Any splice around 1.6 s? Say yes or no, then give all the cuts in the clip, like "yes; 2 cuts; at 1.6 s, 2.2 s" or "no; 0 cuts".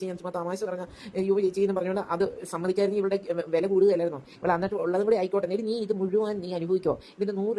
yes; 1 cut; at 1.6 s